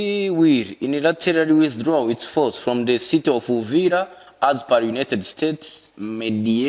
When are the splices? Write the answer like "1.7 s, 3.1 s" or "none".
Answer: none